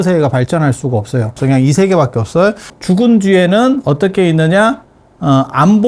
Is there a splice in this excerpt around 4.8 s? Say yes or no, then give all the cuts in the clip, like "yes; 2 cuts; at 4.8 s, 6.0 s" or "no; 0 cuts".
no; 2 cuts; at 1.4 s, 2.7 s